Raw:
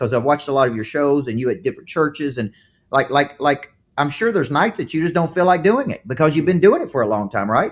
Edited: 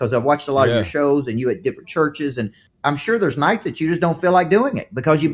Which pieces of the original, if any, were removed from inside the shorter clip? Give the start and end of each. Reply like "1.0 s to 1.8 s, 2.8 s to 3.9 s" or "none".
2.6 s to 3.8 s